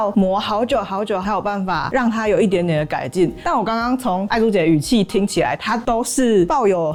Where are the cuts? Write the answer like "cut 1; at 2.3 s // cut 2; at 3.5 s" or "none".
none